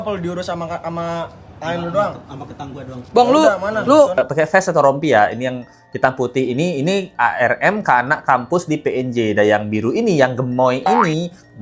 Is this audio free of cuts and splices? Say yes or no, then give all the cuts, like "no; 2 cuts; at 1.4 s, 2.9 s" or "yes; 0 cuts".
no; 1 cut; at 4.2 s